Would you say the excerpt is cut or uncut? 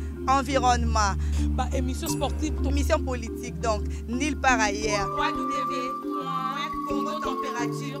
uncut